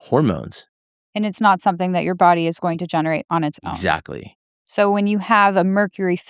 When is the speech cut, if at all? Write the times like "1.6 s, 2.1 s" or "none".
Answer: none